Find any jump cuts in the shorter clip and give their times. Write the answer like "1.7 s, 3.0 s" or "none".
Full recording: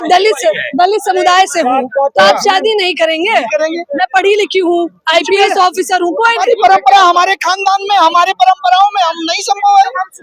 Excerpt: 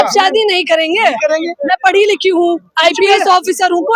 none